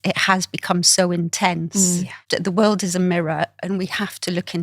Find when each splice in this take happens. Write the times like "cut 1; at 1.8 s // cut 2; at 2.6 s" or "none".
cut 1; at 2.2 s